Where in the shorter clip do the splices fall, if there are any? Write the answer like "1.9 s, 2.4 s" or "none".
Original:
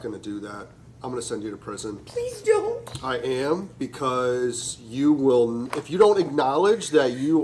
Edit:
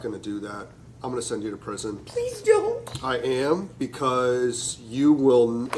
none

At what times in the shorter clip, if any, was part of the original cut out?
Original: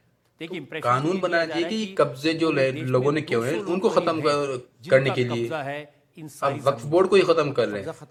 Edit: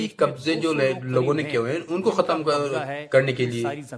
none

